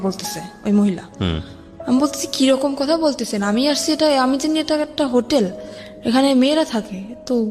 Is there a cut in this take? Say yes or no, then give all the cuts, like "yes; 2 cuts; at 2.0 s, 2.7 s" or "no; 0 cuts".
no; 0 cuts